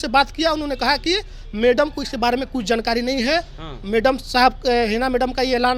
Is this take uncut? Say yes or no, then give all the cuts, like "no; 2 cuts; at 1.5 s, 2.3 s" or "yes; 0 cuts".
yes; 0 cuts